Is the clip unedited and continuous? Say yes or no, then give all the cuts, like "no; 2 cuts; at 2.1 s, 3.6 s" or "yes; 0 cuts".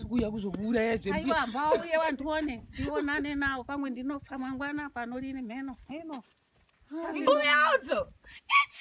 no; 1 cut; at 6.0 s